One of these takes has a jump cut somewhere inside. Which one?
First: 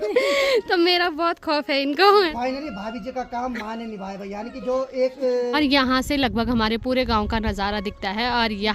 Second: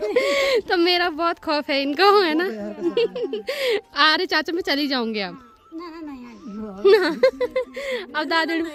first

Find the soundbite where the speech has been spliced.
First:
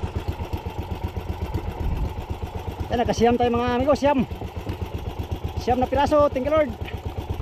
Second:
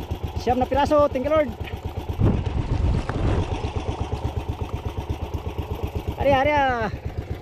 second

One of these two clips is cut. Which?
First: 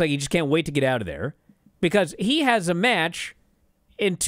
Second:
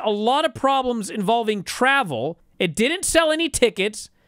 second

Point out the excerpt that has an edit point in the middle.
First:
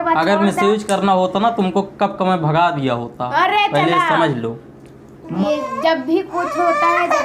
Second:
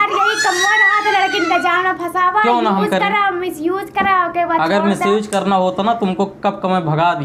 first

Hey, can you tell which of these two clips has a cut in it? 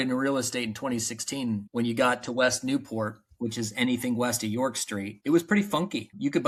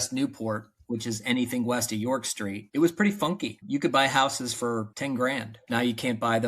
second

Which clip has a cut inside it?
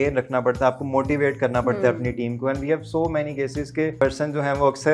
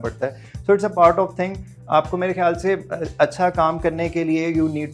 first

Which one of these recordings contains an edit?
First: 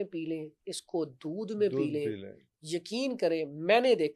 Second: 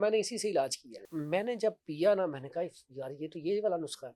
second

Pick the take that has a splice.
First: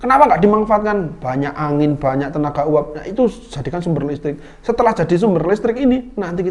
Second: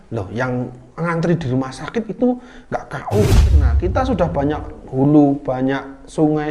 second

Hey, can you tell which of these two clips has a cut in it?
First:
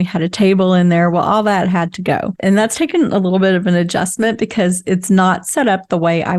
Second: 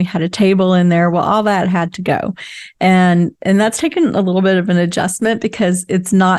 first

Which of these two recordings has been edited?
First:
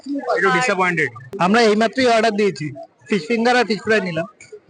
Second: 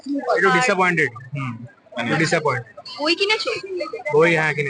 first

